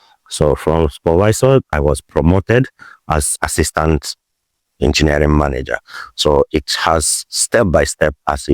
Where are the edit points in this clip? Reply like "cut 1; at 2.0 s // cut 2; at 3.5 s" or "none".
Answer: cut 1; at 1.7 s // cut 2; at 3.3 s